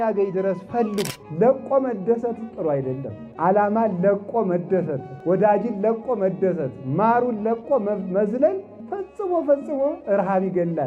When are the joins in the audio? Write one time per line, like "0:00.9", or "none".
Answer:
0:01.1